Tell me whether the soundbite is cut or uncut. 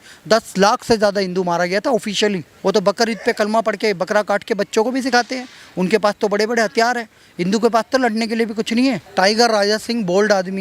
cut